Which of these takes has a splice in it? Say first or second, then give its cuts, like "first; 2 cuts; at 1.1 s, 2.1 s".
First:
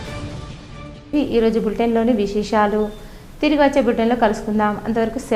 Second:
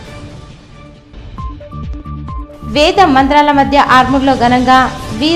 second; 1 cut; at 1.0 s